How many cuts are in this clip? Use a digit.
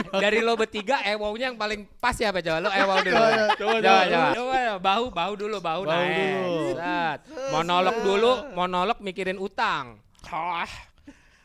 1